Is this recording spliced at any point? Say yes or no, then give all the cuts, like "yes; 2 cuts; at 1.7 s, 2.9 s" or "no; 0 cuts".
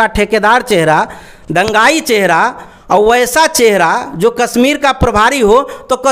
no; 0 cuts